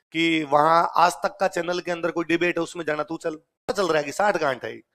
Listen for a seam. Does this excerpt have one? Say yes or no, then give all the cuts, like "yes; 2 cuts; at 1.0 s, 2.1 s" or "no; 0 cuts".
yes; 1 cut; at 3.7 s